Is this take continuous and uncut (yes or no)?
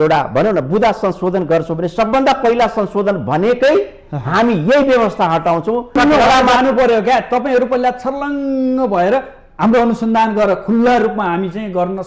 no